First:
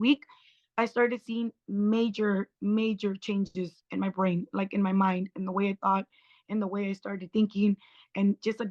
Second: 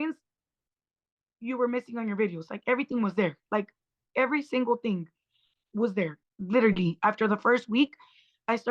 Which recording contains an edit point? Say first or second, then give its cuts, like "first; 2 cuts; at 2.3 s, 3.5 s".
second; 1 cut; at 6.2 s